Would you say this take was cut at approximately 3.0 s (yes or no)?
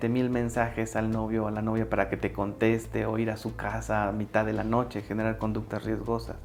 no